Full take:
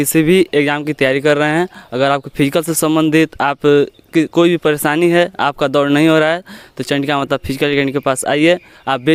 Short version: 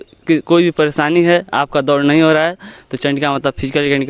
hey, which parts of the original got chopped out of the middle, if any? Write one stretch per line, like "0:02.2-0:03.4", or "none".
none